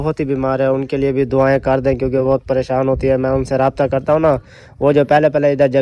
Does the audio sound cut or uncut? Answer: uncut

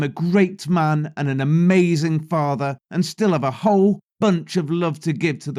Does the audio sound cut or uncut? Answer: uncut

